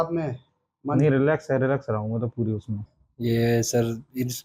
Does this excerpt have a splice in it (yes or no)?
yes